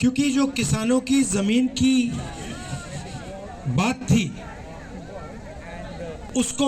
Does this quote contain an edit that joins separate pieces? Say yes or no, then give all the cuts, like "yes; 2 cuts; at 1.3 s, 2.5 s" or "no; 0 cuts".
no; 0 cuts